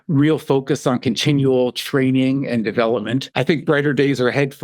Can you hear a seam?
yes; 1 cut; at 3.3 s

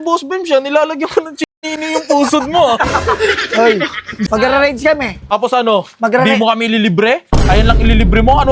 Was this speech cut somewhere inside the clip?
yes; 2 cuts; at 4.3 s, 5.3 s

